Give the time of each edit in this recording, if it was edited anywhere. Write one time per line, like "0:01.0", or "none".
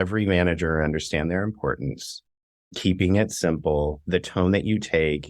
0:04.0